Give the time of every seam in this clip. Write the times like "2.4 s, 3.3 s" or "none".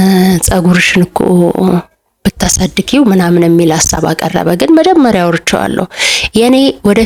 none